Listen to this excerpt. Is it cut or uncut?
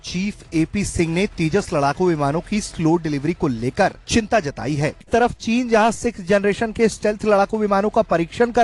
cut